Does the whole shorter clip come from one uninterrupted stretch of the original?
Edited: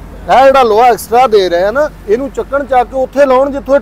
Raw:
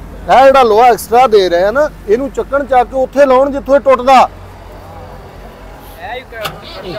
yes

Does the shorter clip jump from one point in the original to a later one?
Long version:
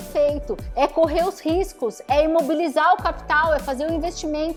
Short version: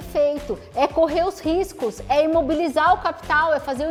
no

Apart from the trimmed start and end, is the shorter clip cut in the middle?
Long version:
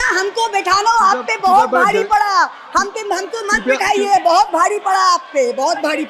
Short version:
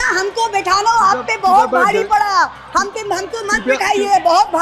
no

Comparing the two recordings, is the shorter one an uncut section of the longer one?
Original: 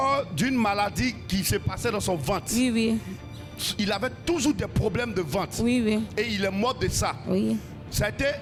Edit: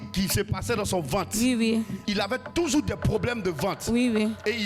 no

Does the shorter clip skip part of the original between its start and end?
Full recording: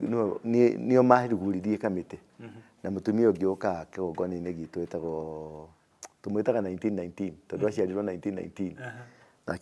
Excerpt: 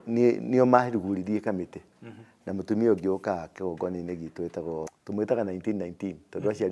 yes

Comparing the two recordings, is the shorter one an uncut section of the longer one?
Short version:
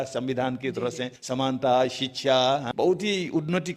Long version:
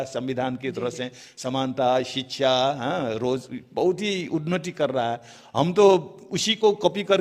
no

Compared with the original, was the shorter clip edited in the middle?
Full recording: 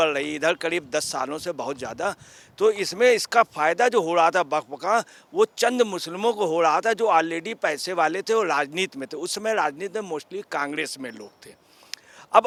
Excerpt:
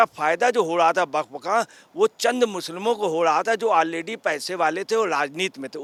no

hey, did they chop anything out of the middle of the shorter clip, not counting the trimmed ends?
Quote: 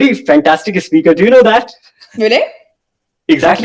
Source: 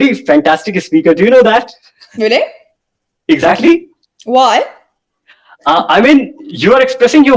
no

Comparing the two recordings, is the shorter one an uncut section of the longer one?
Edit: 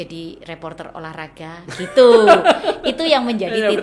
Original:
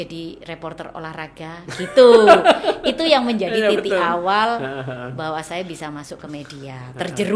yes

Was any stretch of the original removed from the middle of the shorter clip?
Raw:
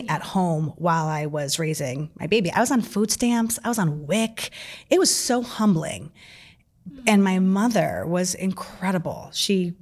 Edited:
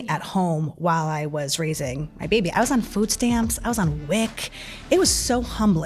no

